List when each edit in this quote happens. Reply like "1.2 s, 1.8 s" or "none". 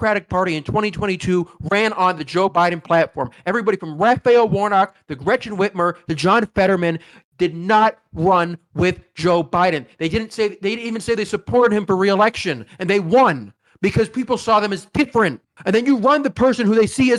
none

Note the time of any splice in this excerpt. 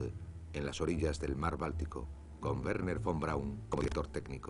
2.6 s

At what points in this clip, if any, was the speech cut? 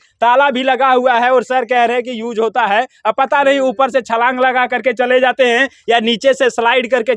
none

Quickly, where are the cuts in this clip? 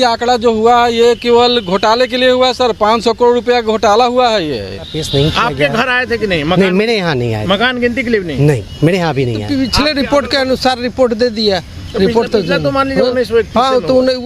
5.0 s, 9.4 s

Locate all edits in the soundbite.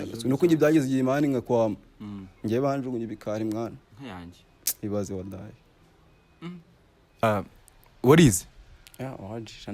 7.2 s

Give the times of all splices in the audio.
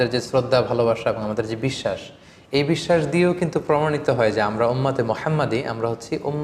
none

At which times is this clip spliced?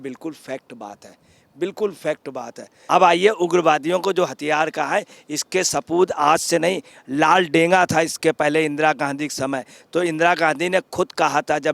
2.7 s

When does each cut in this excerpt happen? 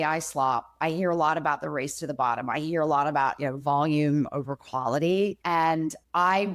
5.4 s

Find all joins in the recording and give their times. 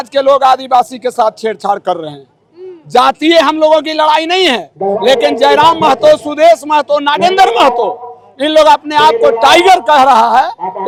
none

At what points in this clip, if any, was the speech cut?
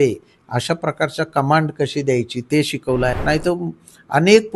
3.2 s

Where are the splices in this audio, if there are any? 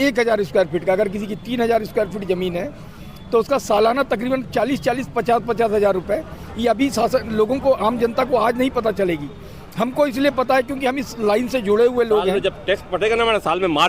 none

